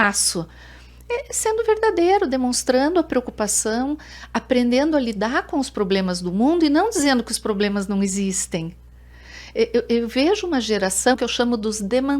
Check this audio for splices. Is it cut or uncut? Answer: cut